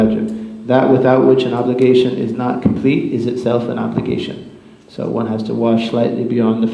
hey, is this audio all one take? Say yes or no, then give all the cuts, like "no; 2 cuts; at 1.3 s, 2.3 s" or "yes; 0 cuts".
yes; 0 cuts